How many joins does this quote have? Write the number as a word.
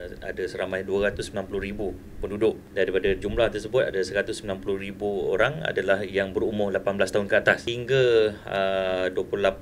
two